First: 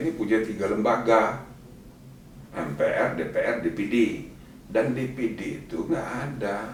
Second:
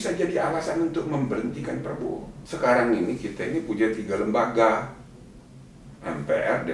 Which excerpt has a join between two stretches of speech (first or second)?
second